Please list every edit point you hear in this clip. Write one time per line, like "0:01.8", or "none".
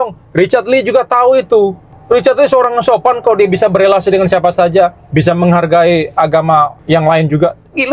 0:01.9
0:05.0
0:06.8